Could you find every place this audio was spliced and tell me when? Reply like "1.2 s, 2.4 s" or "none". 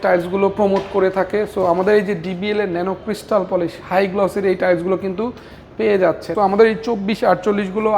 6.3 s